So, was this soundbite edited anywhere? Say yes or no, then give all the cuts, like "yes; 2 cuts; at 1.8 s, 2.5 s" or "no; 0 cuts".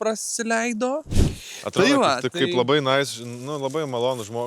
yes; 1 cut; at 1.1 s